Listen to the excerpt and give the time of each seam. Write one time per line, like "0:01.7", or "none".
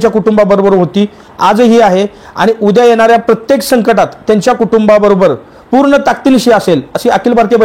none